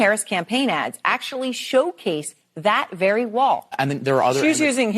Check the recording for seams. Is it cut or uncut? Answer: cut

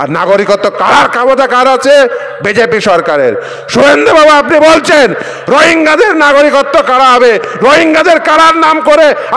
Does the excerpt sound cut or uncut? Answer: uncut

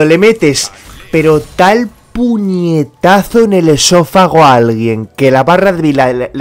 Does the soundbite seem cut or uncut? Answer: uncut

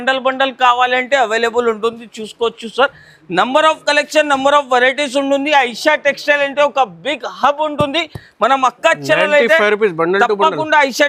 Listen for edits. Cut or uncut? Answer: uncut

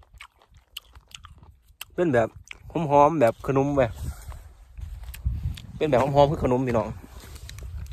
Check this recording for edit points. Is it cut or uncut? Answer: uncut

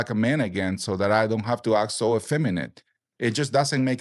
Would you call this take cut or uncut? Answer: uncut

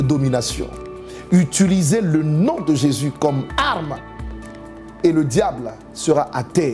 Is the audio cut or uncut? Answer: uncut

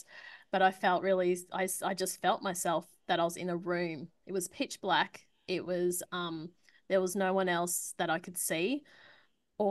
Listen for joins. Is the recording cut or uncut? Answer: uncut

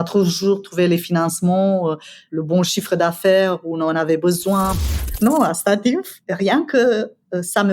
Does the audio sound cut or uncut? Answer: cut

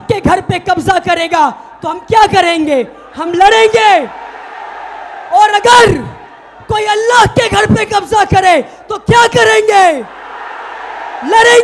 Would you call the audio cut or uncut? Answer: uncut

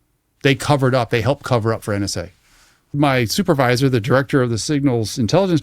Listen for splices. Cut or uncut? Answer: cut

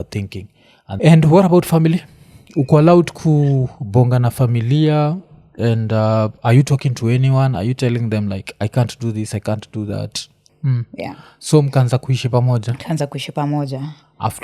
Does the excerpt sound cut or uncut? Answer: cut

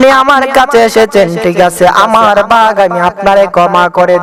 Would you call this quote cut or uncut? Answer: uncut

